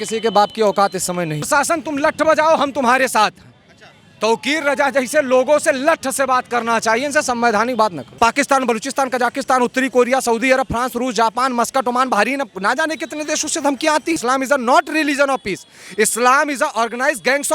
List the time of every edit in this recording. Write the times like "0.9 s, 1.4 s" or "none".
1.5 s, 8.0 s, 14.2 s